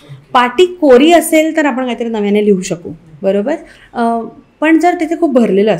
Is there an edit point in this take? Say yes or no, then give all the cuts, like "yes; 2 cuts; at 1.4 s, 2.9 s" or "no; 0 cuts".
no; 0 cuts